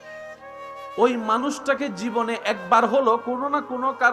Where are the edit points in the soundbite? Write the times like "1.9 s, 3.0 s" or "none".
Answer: 0.9 s